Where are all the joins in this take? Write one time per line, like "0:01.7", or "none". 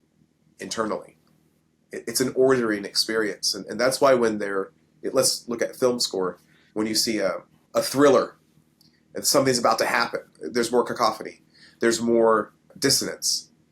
0:07.5
0:10.4
0:12.6